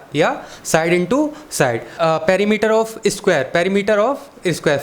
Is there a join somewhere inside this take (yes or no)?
yes